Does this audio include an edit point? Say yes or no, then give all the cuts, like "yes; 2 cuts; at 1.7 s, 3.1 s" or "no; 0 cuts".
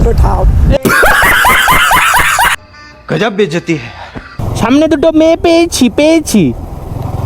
yes; 1 cut; at 4.3 s